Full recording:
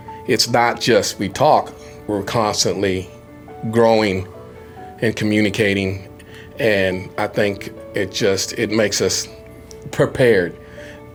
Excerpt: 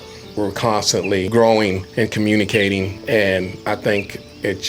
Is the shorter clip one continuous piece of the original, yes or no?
no